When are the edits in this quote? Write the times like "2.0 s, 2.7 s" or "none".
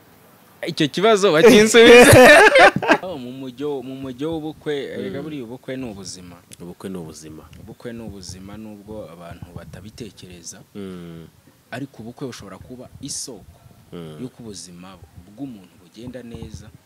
3.0 s